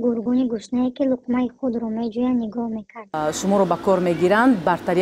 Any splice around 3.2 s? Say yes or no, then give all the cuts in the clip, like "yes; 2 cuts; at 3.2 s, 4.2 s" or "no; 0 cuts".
yes; 1 cut; at 3.2 s